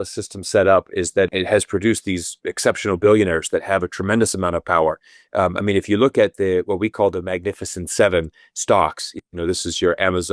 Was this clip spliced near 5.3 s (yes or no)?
no